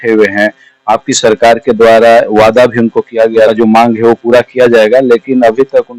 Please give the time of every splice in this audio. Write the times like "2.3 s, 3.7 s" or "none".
3.5 s

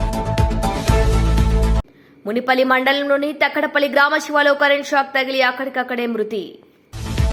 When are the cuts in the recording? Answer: none

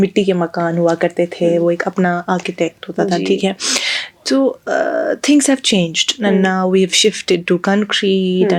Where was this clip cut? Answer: none

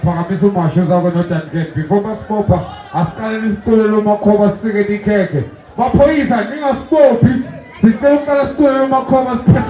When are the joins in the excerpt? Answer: none

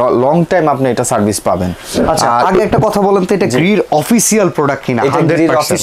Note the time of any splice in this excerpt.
none

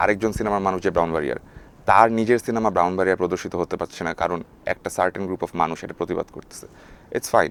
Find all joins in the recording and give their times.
none

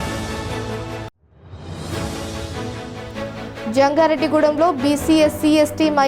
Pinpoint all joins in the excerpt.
1.1 s, 3.6 s

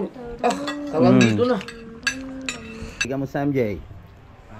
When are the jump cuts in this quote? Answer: 3.1 s

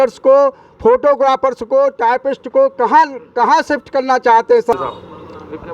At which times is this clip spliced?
4.7 s

